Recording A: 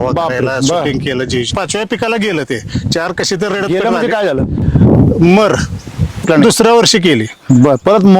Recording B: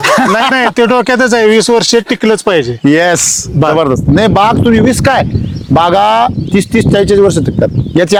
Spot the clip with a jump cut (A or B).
A